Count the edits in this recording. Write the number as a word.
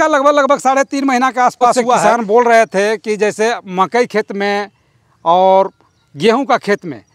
one